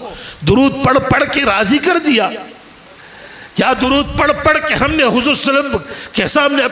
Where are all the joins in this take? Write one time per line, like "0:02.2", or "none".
none

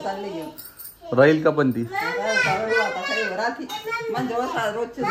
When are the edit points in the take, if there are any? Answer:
none

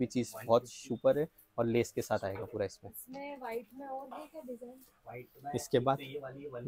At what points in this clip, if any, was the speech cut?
none

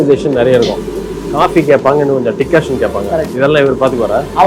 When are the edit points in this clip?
none

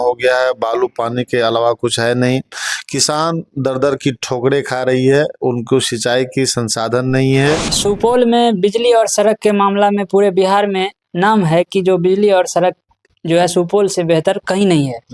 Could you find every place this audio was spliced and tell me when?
0:07.7

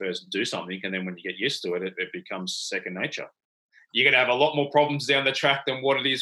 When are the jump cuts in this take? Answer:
0:03.8

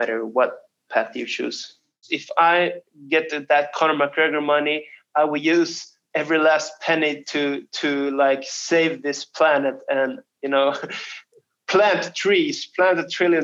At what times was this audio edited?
0:02.1

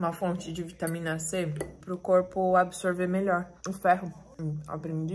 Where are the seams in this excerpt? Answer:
0:01.7
0:04.2

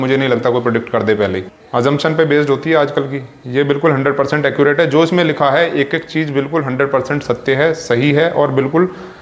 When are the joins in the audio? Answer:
0:01.5

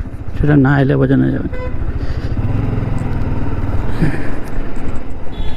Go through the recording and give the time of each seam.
none

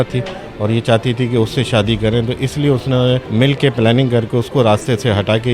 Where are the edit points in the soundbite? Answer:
0:03.3

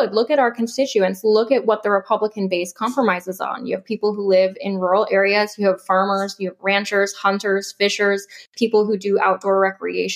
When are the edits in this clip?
none

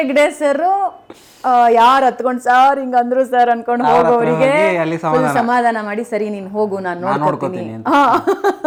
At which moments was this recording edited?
none

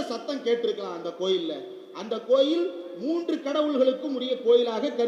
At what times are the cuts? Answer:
none

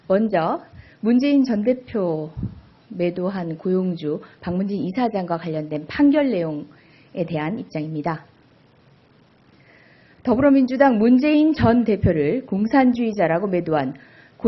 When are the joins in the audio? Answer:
none

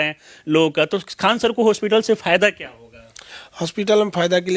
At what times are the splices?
none

